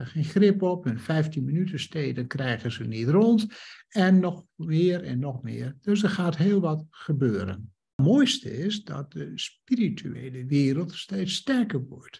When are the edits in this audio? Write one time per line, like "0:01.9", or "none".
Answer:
0:08.0